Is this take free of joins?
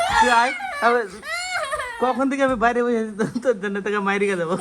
yes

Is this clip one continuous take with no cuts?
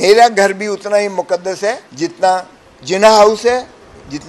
no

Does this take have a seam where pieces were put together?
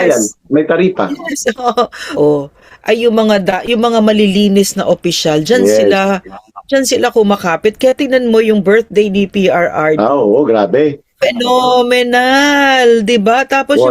yes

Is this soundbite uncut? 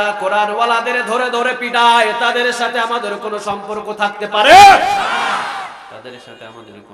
yes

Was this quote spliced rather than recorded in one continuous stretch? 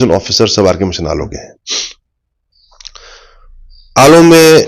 no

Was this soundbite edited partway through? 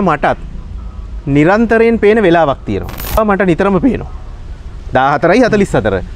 yes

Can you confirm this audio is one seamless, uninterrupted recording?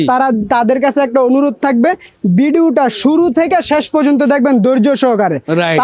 yes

